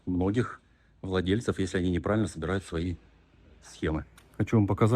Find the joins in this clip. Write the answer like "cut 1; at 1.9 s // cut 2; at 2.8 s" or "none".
cut 1; at 4.1 s